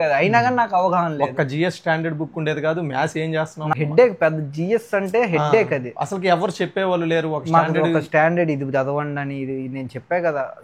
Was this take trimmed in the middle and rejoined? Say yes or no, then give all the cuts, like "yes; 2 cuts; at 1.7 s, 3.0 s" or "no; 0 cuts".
yes; 1 cut; at 3.7 s